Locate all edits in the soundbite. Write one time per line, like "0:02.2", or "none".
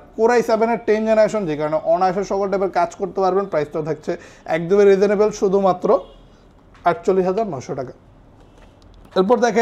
none

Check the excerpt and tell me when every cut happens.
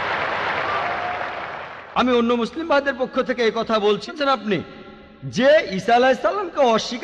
0:04.0

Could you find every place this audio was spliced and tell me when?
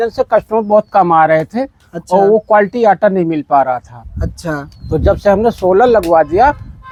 none

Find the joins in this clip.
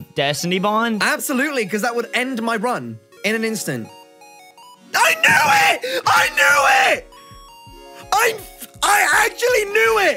none

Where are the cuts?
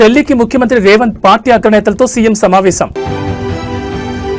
none

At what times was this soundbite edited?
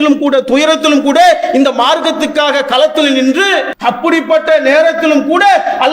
0:03.7

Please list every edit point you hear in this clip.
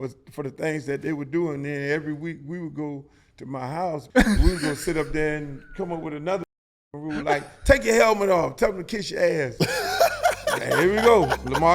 0:04.0

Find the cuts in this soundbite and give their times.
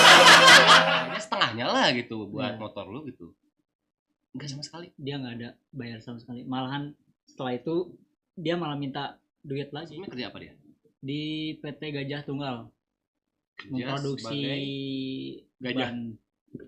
0:01.1
0:10.0

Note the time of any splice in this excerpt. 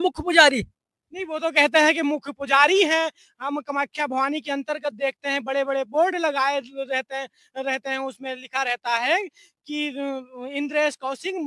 none

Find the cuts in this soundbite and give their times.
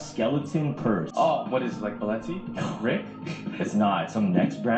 0:01.1

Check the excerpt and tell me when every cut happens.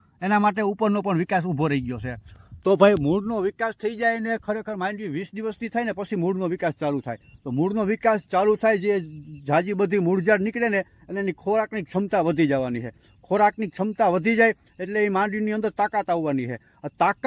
none

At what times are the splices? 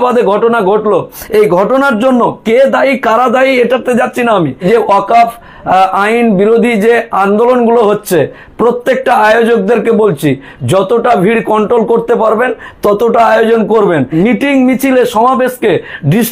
0:04.6
0:14.1

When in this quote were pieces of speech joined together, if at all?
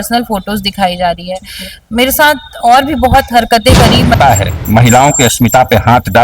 0:04.2

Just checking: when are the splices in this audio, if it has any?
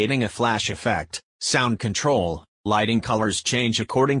0:01.6
0:02.5

